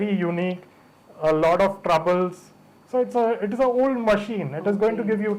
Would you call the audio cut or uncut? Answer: uncut